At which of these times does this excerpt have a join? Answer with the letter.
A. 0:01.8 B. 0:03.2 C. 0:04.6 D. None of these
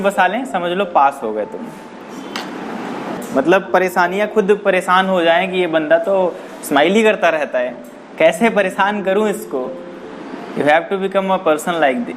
B